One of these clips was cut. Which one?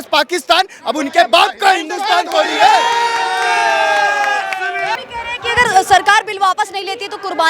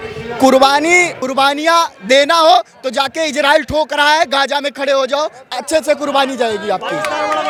first; 1 cut; at 5.0 s

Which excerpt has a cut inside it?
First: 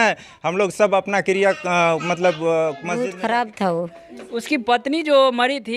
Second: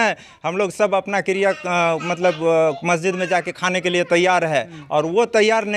first; 1 cut; at 2.9 s

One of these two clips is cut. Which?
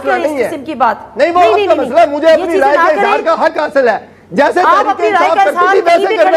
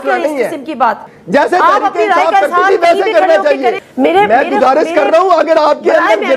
second; 2 cuts; at 1.1 s, 3.8 s

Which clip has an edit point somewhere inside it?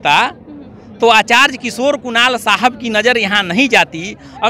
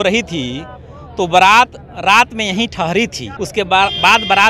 second; 1 cut; at 3.3 s

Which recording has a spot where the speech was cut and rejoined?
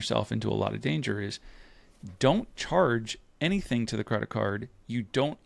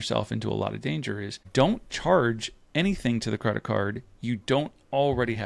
second; 1 cut; at 1.3 s

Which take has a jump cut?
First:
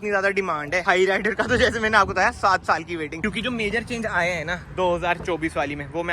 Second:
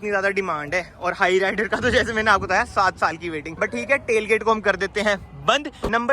first; 2 cuts; at 0.8 s, 3.1 s

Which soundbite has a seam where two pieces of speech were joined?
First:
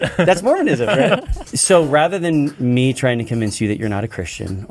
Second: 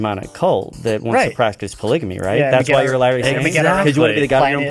first; 1 cut; at 1.3 s

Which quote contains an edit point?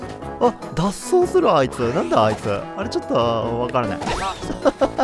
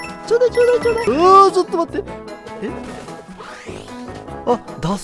second; 1 cut; at 1.1 s

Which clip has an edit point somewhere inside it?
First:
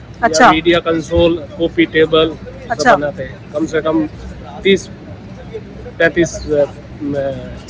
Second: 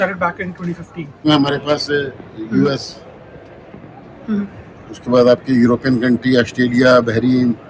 second; 1 cut; at 1.2 s

